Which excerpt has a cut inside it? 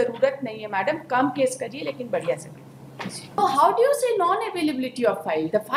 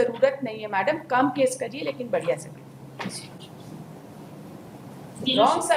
first; 1 cut; at 3.4 s

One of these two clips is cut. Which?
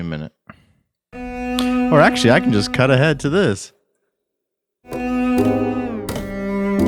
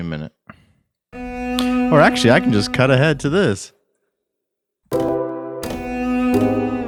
first; 1 cut; at 4.9 s

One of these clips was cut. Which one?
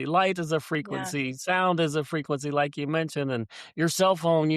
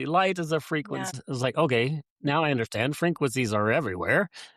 second; 1 cut; at 1.2 s

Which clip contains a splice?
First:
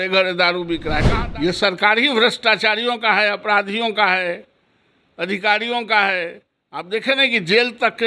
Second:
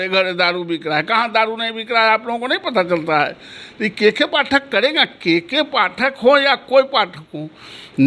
first; 1 cut; at 1.0 s

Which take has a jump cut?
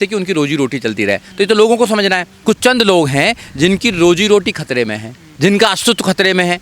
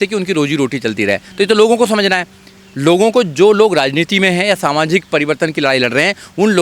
first; 1 cut; at 2.3 s

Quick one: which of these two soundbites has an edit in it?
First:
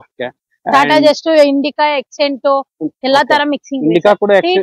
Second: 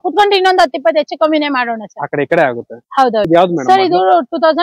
second; 1 cut; at 3.3 s

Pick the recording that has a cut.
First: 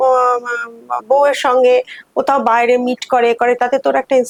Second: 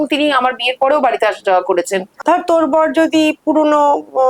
second; 1 cut; at 2.1 s

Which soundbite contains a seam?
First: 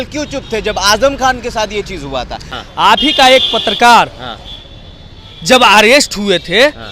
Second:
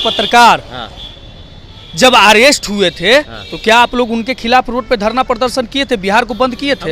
first; 1 cut; at 2.5 s

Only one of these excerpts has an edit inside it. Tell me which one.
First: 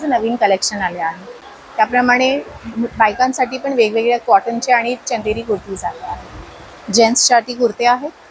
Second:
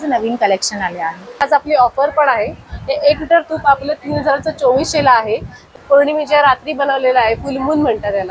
second; 2 cuts; at 1.4 s, 5.8 s

